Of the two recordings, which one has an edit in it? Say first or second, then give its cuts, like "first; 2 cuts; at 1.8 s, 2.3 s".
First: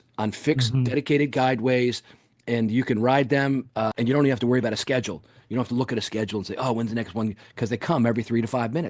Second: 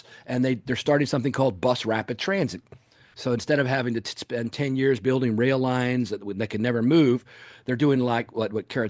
first; 1 cut; at 3.9 s